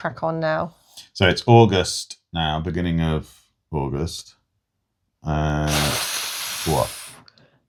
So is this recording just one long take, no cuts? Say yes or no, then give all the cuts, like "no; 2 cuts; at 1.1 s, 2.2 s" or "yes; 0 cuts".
yes; 0 cuts